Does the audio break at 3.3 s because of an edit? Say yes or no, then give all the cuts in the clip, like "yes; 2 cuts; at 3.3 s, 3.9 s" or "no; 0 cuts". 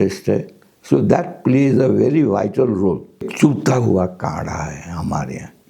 yes; 1 cut; at 3.3 s